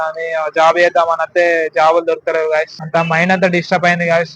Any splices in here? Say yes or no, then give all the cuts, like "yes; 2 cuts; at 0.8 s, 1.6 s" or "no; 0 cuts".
yes; 1 cut; at 2.8 s